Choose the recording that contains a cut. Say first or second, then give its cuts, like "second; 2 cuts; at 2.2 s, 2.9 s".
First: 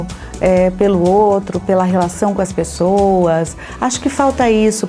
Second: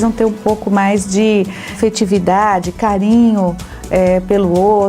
second; 1 cut; at 1.7 s